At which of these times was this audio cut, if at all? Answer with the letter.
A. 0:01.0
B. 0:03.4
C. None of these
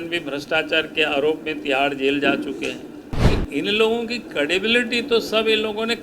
B